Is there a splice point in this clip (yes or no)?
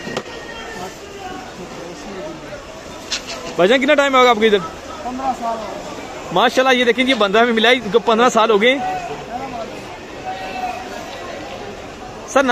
no